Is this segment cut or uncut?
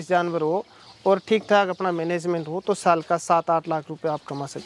uncut